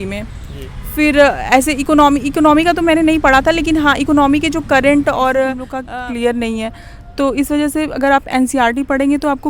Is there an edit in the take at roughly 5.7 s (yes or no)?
yes